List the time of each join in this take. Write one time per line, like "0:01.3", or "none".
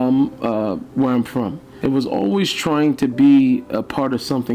0:01.6